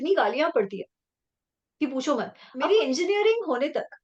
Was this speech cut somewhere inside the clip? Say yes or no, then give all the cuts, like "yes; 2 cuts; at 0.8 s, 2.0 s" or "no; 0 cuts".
yes; 1 cut; at 2.4 s